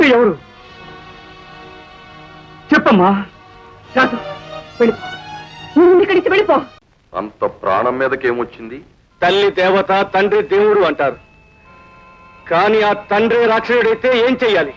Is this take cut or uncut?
cut